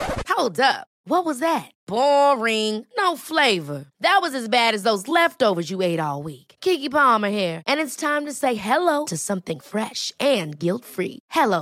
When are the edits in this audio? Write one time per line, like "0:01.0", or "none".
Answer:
none